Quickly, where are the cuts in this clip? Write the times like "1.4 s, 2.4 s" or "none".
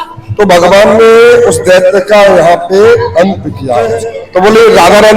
4.0 s